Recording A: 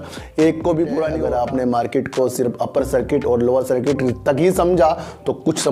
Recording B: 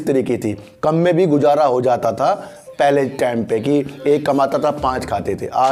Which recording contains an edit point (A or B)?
A